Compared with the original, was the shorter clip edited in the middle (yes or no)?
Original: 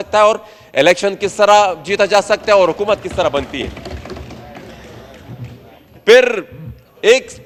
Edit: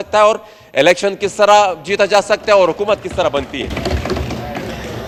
no